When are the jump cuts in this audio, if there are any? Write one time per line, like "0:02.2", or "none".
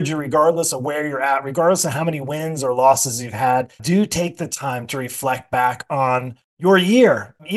0:03.8